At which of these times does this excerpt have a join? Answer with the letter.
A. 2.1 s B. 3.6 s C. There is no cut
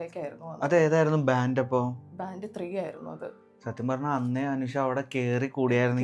C